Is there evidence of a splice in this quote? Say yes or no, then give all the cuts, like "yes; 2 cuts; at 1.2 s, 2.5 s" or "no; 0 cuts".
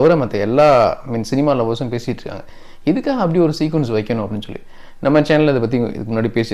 no; 0 cuts